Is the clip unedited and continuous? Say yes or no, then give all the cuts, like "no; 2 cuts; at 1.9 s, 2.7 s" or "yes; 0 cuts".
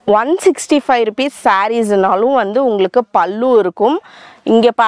yes; 0 cuts